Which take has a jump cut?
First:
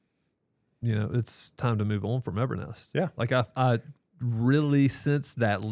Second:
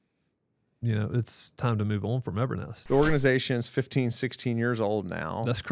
second; 1 cut; at 2.8 s

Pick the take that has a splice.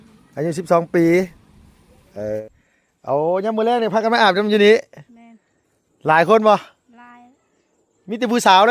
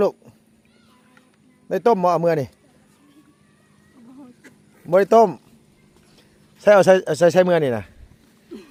first; 1 cut; at 2.5 s

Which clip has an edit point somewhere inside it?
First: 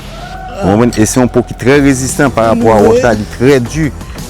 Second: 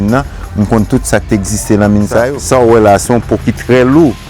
second; 1 cut; at 2.4 s

